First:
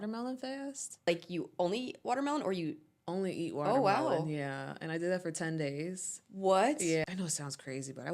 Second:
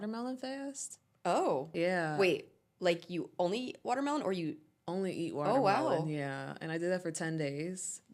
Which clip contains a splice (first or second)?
first